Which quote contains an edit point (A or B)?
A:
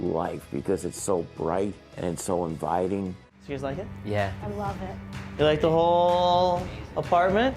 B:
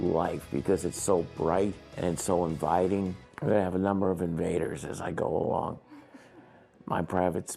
A